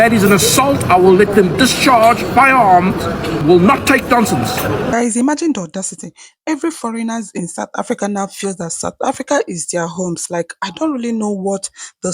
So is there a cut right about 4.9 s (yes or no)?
yes